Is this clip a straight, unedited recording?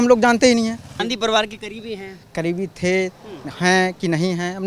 no; 1 cut; at 1.0 s

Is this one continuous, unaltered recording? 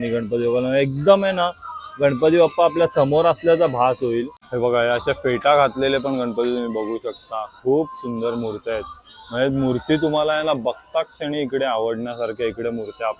yes; 0 cuts

